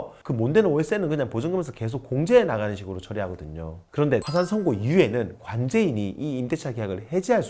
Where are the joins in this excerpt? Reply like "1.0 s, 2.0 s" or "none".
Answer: 4.0 s

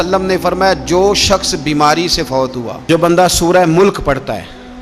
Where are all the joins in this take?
2.8 s

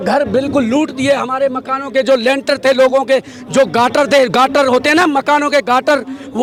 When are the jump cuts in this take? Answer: none

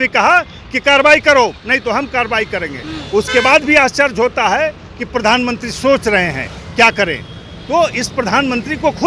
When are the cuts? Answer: none

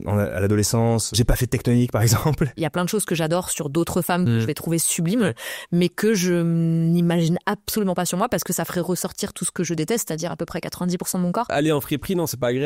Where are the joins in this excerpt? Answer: 1.1 s, 2.6 s, 11.5 s

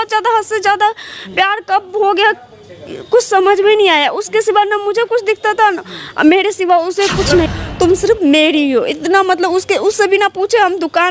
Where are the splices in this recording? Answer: 7.5 s

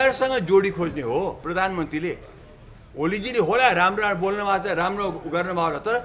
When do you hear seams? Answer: none

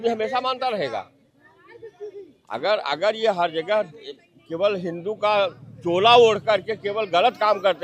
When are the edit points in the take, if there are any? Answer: none

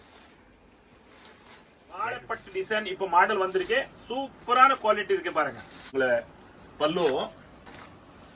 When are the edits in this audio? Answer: 2.0 s, 5.8 s

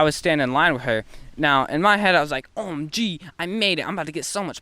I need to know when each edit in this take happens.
none

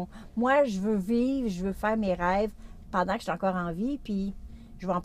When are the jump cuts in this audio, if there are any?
none

